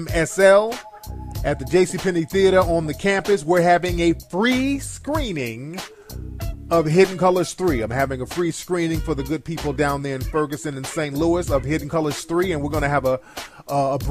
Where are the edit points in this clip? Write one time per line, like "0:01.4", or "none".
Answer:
none

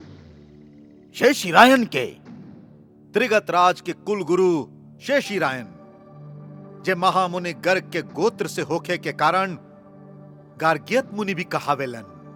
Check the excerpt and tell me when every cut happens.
none

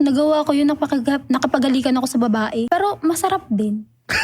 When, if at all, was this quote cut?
0:02.7

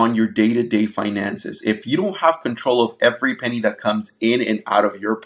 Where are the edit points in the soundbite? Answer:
none

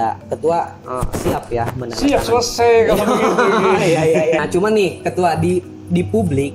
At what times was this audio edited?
0:04.4

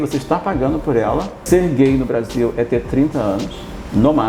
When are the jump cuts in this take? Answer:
0:01.4

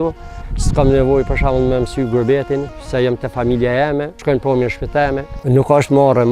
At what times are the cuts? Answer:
0:04.1
0:05.4

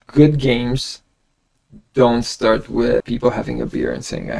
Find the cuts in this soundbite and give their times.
0:03.0

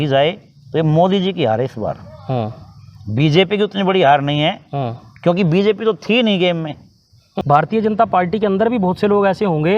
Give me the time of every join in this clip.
0:07.3

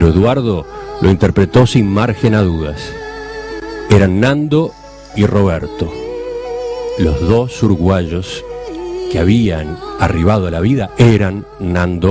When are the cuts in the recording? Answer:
0:08.3

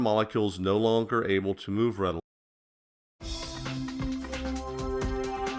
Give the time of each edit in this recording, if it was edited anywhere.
none

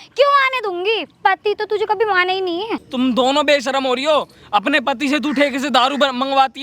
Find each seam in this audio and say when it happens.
0:02.8

